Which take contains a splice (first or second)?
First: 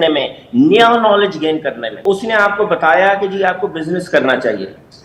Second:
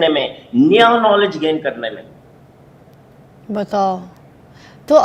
first